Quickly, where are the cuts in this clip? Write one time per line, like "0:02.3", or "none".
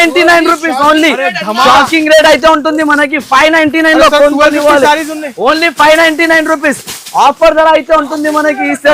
none

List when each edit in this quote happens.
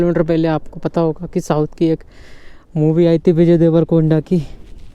none

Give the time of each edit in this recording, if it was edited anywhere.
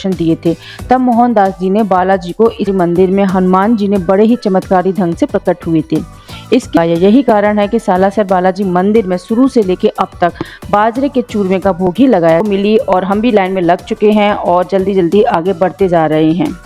0:02.7
0:06.8
0:12.4

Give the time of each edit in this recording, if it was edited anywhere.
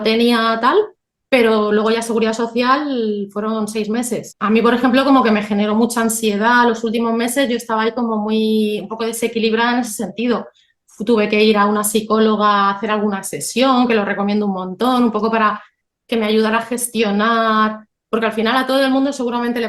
0:04.3

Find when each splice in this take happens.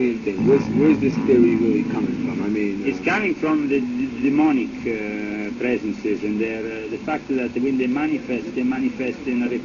none

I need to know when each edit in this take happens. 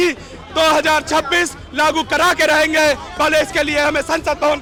none

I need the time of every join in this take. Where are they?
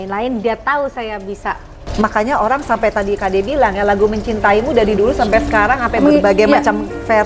0:01.9

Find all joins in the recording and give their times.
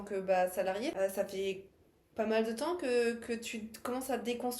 0:00.9

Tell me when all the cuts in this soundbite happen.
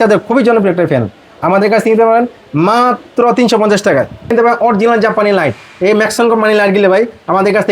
0:04.3

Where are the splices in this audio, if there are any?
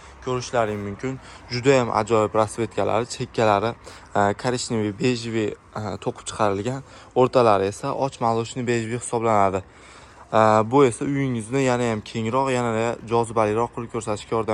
none

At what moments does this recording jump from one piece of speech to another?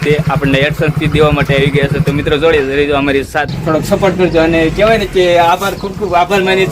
0:03.5

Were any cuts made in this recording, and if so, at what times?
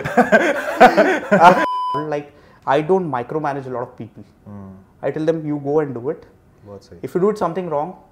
0:01.7

